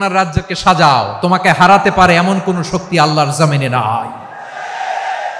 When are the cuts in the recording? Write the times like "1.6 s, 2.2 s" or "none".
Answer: none